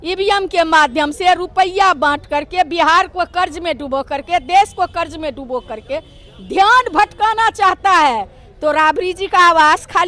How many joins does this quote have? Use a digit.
0